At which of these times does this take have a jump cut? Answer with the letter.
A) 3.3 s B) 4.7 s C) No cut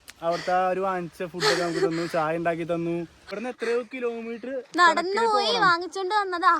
A